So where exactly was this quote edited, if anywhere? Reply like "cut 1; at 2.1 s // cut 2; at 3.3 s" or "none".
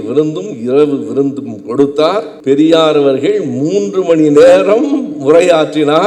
cut 1; at 2.3 s